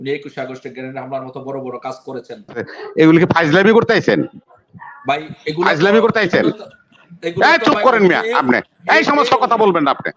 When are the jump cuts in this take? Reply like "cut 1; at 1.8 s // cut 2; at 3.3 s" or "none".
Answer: cut 1; at 2.8 s